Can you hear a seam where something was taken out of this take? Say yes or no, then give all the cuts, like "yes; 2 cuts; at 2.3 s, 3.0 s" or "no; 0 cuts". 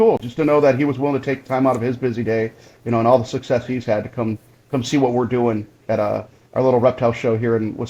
no; 0 cuts